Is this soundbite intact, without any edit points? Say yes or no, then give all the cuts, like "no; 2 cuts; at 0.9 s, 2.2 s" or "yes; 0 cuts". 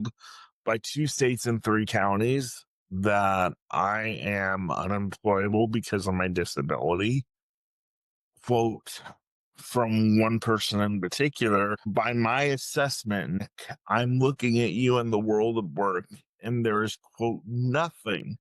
no; 2 cuts; at 11.9 s, 13.4 s